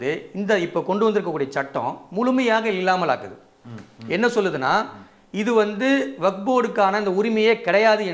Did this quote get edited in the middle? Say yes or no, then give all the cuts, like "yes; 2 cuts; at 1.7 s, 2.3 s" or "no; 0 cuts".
no; 0 cuts